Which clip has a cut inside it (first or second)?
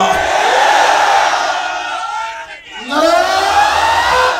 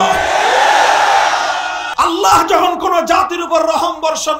second